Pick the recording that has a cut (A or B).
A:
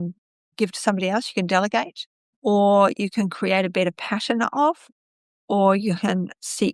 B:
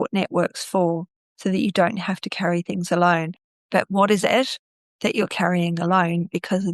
B